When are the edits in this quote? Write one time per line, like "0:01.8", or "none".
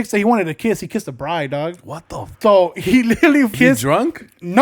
0:02.3
0:03.5